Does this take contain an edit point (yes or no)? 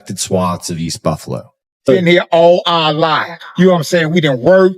yes